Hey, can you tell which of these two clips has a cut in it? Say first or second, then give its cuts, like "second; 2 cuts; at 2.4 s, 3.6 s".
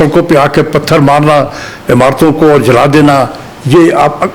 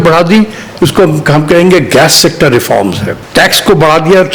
second; 1 cut; at 3.1 s